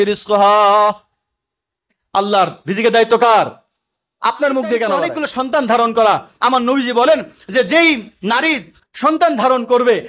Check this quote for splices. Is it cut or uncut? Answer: cut